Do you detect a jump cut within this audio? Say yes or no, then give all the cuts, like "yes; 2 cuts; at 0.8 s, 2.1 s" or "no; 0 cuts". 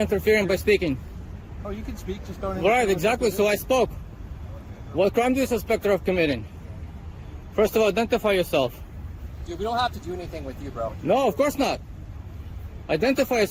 no; 0 cuts